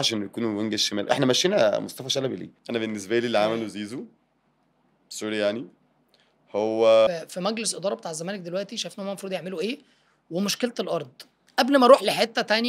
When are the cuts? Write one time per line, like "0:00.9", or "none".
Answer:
0:02.5
0:07.1